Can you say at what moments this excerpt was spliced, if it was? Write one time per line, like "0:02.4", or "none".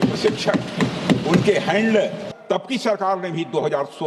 0:02.3